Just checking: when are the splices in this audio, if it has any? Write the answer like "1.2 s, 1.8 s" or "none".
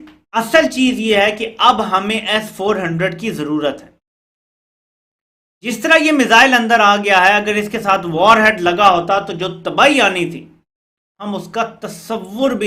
none